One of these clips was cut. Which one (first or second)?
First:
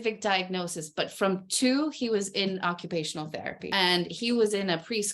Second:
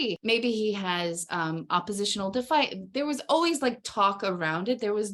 first